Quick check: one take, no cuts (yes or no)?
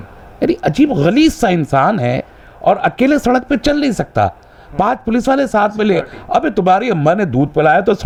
yes